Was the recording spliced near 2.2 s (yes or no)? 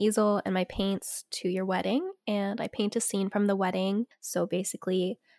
no